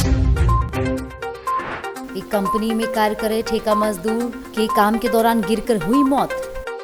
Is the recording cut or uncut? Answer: uncut